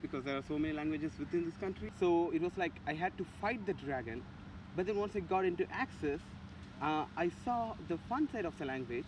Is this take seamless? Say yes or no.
no